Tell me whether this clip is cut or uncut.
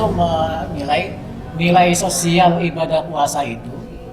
uncut